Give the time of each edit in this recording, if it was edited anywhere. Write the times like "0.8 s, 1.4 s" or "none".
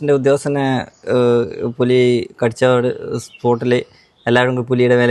none

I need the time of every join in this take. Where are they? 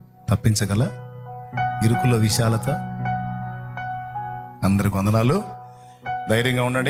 none

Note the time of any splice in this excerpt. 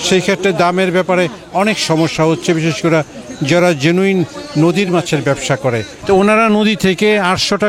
5.9 s

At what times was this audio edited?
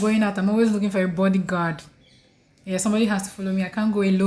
none

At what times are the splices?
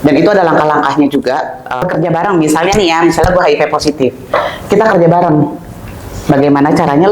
1.8 s

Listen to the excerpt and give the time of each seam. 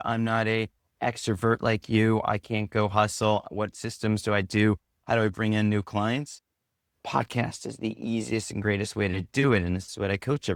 none

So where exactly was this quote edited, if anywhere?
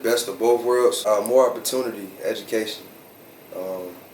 1.0 s

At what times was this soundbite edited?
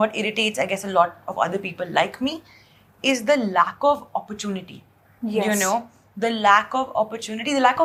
none

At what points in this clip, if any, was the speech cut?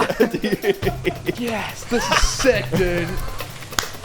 1.4 s

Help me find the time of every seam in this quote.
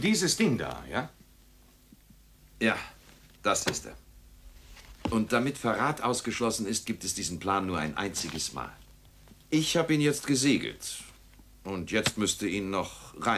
none

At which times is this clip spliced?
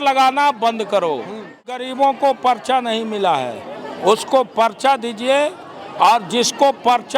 1.8 s

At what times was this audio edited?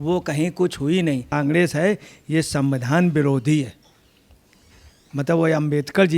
1.3 s

